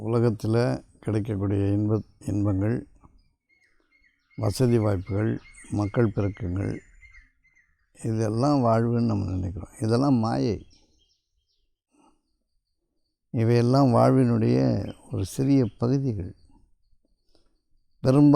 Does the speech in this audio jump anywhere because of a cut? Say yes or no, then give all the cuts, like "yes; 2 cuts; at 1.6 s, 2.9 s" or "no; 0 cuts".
yes; 1 cut; at 12.2 s